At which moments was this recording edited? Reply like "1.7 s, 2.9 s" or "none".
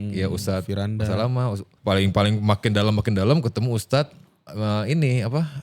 1.7 s